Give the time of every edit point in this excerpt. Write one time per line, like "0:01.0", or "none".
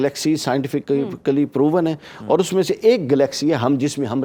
none

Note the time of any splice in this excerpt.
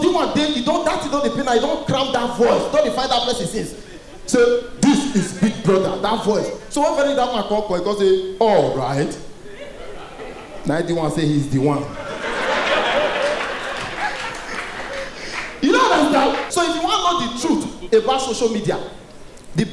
0:16.5

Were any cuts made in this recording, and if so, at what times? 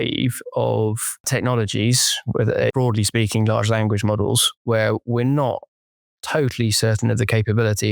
0:01.3
0:02.7

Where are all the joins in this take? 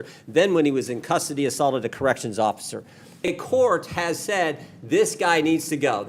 0:03.3

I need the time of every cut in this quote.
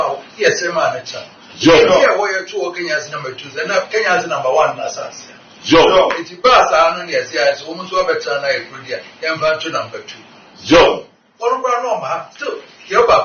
none

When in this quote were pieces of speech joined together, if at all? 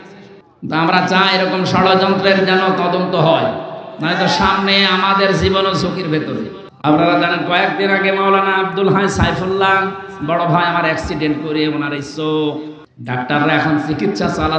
0:06.6

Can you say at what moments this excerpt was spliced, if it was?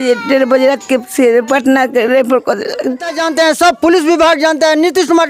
0:03.2

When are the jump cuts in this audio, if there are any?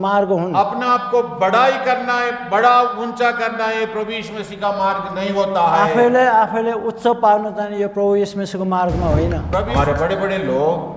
0:09.7

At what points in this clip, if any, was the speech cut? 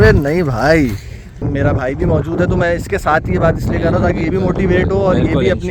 0:01.4

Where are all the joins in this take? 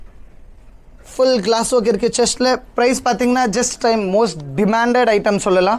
0:03.7

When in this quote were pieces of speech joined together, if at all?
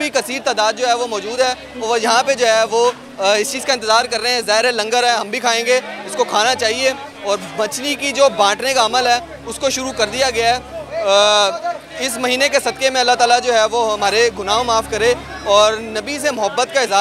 none

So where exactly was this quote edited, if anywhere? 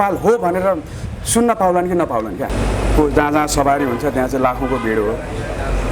0:02.5

